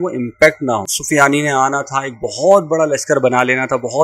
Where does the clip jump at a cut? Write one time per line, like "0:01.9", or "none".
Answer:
0:00.9